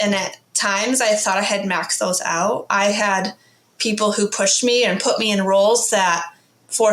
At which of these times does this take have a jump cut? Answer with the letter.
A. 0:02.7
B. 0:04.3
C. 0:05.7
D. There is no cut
A